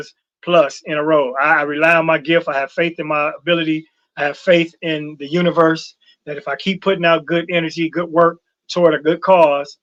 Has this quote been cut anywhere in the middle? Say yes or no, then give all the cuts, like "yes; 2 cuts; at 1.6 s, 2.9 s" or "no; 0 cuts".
no; 0 cuts